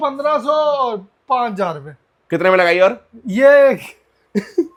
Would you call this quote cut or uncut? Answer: uncut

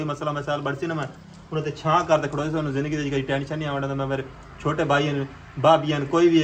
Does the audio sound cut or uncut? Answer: uncut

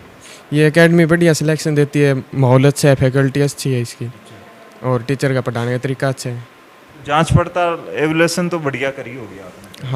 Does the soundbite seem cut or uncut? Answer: uncut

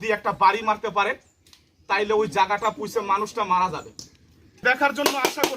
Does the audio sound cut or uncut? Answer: cut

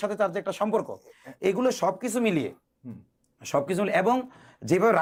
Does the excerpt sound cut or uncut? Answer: uncut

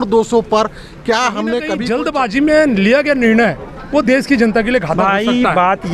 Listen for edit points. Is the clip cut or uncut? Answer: cut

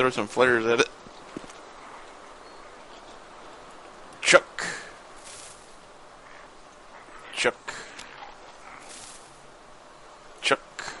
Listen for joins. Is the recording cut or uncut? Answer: uncut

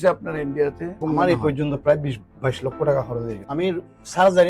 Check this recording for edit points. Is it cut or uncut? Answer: cut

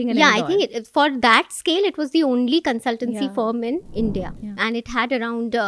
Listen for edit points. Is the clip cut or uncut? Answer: cut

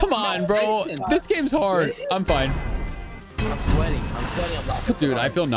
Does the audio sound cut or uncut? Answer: uncut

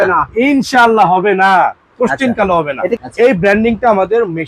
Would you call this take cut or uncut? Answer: uncut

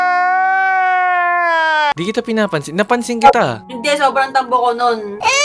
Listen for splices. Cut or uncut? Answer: cut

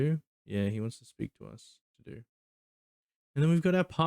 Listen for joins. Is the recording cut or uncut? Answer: cut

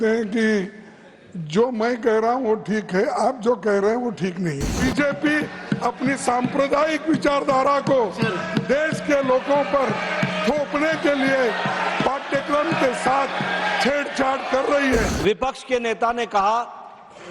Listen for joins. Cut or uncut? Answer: cut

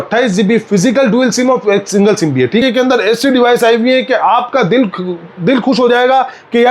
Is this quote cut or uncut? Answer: cut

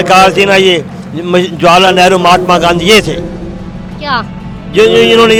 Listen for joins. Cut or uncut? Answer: uncut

